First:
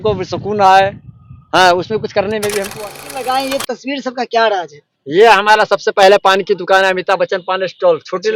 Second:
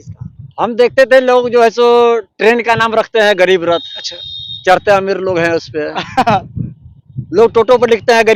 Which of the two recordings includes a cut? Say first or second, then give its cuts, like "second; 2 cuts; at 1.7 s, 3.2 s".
first; 1 cut; at 2.7 s